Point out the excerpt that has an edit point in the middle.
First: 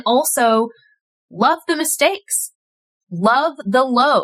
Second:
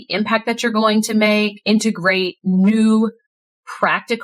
second; 1 cut; at 1.6 s

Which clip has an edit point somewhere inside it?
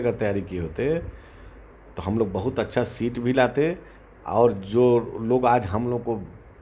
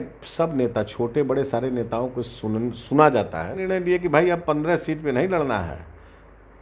second; 1 cut; at 3.6 s

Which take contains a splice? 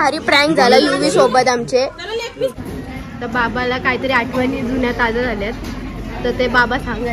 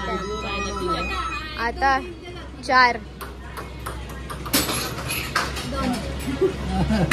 first; 1 cut; at 2.9 s

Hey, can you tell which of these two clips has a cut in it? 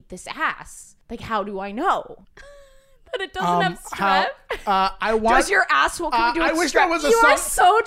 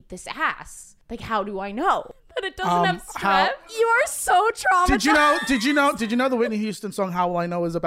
second; 2 cuts; at 2.2 s, 3.7 s

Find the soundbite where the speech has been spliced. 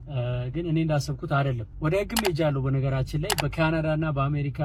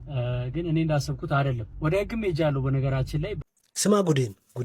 second; 1 cut; at 3.3 s

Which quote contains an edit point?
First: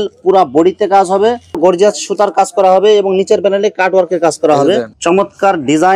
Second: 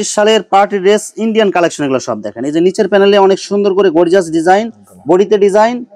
first; 2 cuts; at 1.5 s, 4.9 s

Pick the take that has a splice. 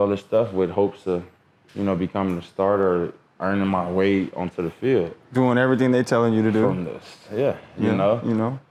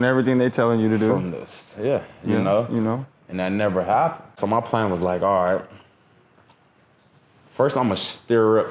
second; 1 cut; at 4.3 s

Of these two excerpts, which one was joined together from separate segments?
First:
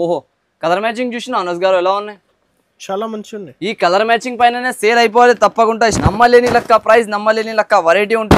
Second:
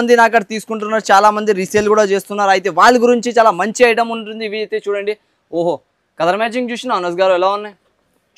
first; 1 cut; at 6.0 s

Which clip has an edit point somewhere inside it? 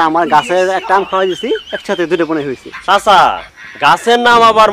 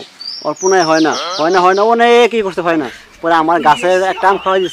first; 1 cut; at 2.7 s

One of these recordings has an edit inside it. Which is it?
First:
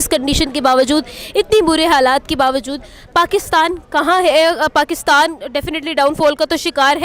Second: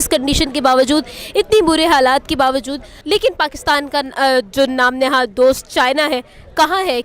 second; 1 cut; at 2.9 s

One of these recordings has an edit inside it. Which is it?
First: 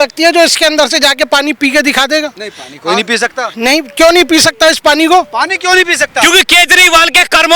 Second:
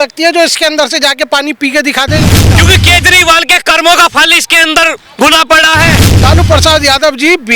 second; 2 cuts; at 2.5 s, 6.1 s

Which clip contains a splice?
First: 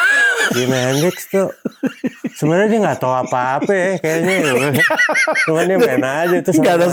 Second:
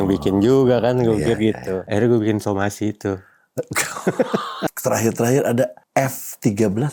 second; 3 cuts; at 1.8 s, 4.7 s, 5.8 s

